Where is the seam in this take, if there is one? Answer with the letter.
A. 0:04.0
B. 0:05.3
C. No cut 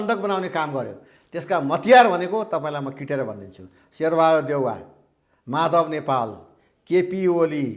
C